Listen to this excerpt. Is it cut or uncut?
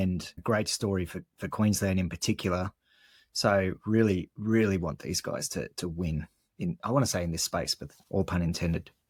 uncut